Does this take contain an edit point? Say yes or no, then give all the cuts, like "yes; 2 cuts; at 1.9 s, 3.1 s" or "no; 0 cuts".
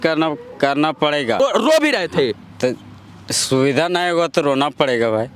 yes; 1 cut; at 1.4 s